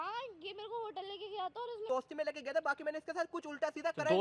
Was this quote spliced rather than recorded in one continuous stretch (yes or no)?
yes